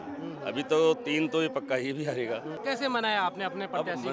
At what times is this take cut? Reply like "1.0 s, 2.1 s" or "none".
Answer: 2.5 s